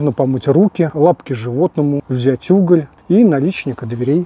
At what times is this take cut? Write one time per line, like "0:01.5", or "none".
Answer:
0:00.9
0:02.1
0:02.9